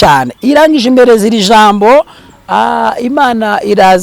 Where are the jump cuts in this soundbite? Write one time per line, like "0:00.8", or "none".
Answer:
0:02.2